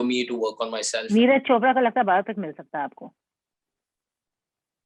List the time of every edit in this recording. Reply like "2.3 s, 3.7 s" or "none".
1.0 s